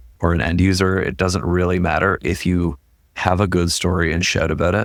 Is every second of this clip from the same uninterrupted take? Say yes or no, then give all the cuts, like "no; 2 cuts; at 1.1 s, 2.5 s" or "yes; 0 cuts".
yes; 0 cuts